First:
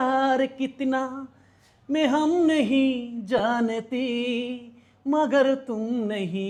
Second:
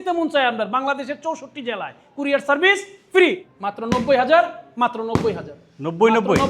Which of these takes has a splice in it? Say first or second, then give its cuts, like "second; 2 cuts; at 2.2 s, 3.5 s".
second; 1 cut; at 3.4 s